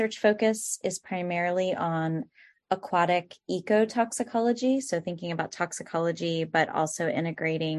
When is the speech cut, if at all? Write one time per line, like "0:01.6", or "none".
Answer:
none